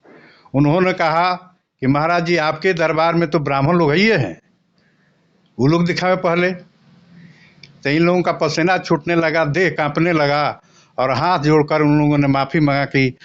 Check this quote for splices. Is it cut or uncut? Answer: uncut